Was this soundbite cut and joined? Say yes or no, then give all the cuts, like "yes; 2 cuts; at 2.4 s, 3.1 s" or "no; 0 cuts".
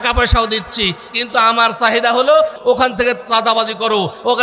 yes; 1 cut; at 2.6 s